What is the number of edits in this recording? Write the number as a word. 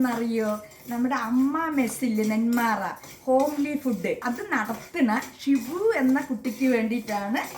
one